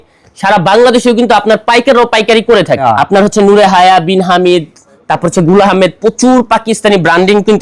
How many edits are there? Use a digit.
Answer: 1